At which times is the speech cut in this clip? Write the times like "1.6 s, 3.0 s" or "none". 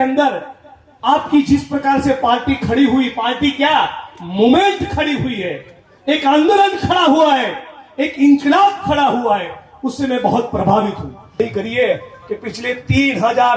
11.4 s